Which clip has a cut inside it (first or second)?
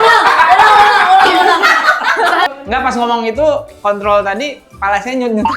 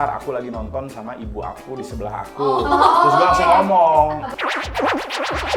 first